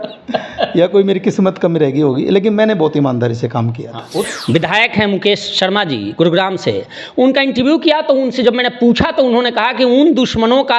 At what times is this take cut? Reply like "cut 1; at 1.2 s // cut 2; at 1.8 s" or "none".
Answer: cut 1; at 4.3 s